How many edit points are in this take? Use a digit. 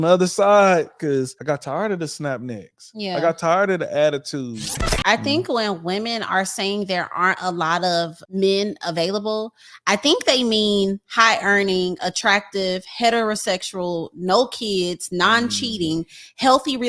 2